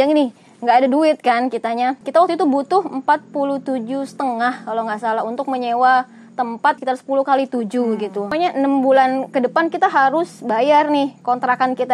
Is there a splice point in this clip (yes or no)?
yes